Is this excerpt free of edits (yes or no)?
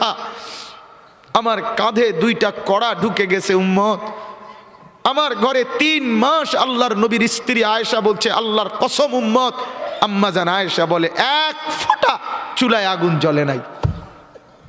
no